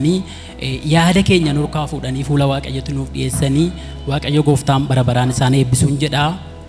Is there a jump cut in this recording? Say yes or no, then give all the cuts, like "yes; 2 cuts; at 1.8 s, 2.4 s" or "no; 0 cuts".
no; 0 cuts